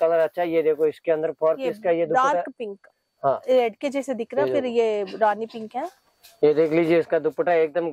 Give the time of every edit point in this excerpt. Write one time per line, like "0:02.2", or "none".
none